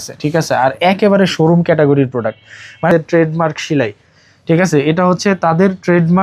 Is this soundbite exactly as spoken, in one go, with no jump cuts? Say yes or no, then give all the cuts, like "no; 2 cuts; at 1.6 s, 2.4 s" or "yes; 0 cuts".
no; 1 cut; at 2.9 s